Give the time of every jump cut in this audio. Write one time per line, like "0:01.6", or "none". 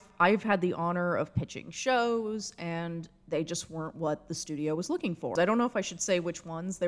0:05.3